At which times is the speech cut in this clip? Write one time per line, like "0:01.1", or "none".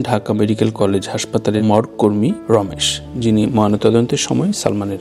none